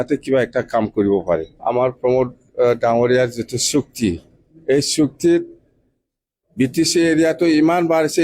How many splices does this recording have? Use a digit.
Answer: 1